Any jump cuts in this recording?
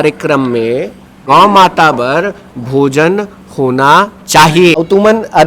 yes; 2 cuts; at 1.1 s, 4.8 s

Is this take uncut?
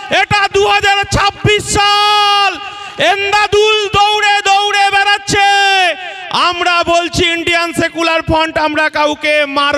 yes; 0 cuts

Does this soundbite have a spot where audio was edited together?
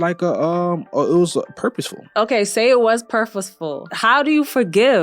yes; 2 cuts; at 2.0 s, 3.9 s

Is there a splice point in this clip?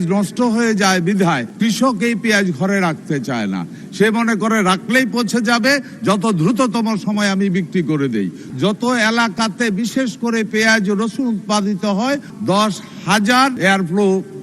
yes; 4 cuts; at 1.5 s, 8.5 s, 12.3 s, 13.6 s

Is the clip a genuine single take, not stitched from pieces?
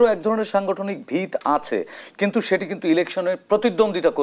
yes; 0 cuts

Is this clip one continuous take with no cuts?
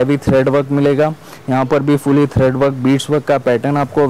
yes; 0 cuts

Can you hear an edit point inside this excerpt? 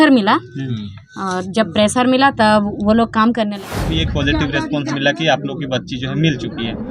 yes; 1 cut; at 3.8 s

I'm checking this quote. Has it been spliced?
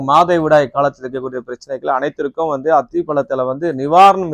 no; 0 cuts

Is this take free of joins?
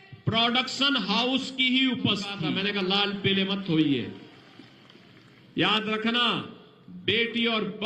no; 1 cut; at 2.5 s

